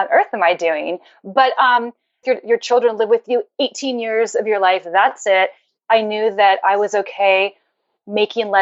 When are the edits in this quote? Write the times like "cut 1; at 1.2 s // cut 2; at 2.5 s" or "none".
cut 1; at 2.2 s